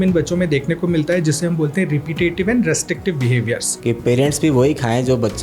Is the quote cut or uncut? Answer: cut